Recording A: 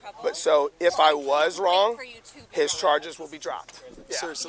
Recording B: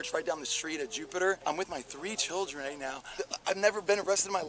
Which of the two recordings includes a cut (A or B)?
B